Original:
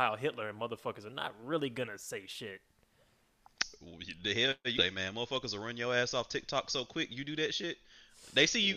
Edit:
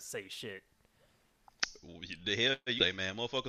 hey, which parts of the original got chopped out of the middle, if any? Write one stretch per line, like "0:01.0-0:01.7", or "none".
none